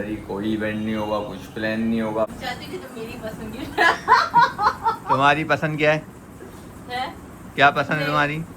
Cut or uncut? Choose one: cut